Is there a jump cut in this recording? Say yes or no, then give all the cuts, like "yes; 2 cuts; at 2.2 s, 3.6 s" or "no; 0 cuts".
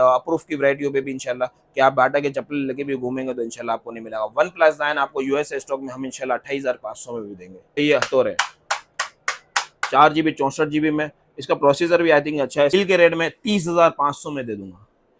yes; 2 cuts; at 7.8 s, 12.7 s